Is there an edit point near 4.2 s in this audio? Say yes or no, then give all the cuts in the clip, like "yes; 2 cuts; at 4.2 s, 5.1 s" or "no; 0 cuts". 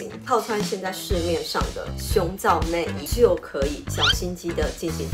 no; 1 cut; at 3.0 s